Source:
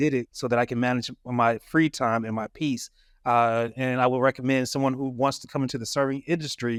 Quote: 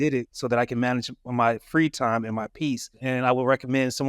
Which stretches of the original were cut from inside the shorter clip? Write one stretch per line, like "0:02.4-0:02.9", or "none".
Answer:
0:03.0-0:03.7